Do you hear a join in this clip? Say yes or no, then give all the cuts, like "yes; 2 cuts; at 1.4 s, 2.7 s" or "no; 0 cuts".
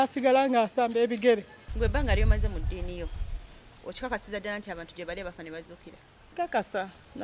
yes; 2 cuts; at 1.6 s, 6.3 s